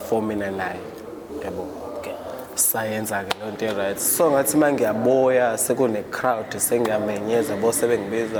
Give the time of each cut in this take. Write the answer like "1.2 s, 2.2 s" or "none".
none